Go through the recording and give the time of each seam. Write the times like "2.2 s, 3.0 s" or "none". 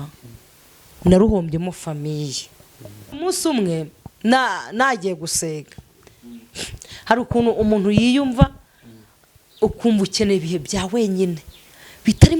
3.1 s